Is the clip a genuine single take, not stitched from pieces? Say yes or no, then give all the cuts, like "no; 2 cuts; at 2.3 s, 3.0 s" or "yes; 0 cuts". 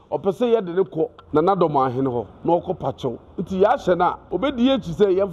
no; 3 cuts; at 1.2 s, 2.3 s, 4.2 s